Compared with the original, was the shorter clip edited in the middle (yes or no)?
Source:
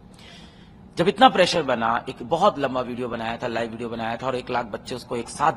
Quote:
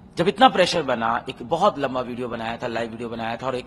no